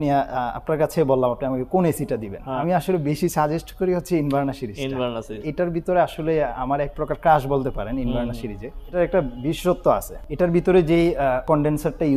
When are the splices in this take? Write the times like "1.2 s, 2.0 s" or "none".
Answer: 2.5 s, 5.4 s, 8.9 s, 10.2 s